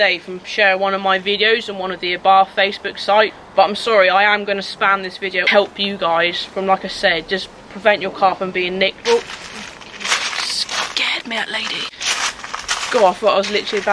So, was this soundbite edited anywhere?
yes; 4 cuts; at 3.4 s, 5.4 s, 9.0 s, 11.9 s

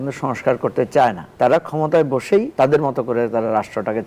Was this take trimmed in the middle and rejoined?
yes; 2 cuts; at 1.2 s, 2.5 s

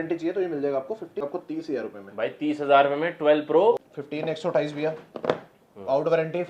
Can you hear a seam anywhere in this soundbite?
yes; 2 cuts; at 1.2 s, 3.8 s

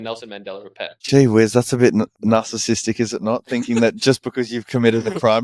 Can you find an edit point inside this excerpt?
yes; 2 cuts; at 1.0 s, 2.1 s

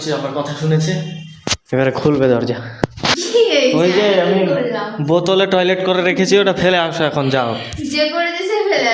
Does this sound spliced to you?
yes; 1 cut; at 3.2 s

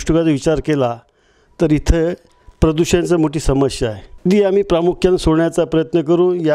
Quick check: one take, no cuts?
no; 1 cut; at 4.1 s

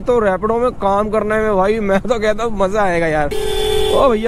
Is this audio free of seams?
no; 1 cut; at 3.4 s

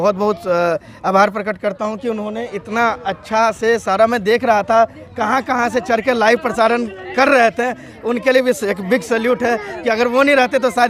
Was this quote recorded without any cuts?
yes; 0 cuts

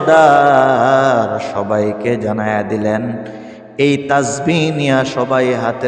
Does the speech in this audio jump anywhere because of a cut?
no; 0 cuts

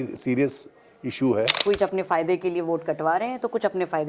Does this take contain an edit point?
yes; 1 cut; at 1.6 s

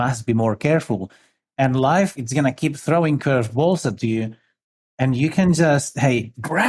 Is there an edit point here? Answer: yes; 2 cuts; at 1.4 s, 2.2 s

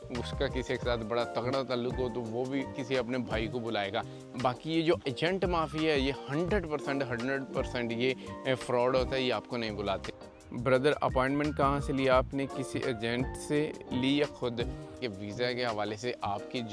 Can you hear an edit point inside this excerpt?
yes; 2 cuts; at 10.1 s, 15.0 s

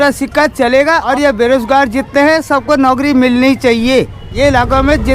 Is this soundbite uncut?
no; 2 cuts; at 1.1 s, 4.2 s

